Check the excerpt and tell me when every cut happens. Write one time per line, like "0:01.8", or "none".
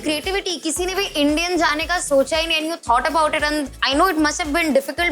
none